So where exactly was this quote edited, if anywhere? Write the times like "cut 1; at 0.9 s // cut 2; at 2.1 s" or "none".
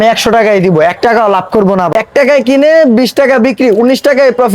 cut 1; at 1.9 s